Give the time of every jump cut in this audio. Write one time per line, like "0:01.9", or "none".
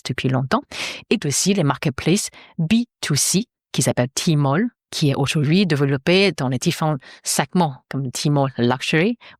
0:04.8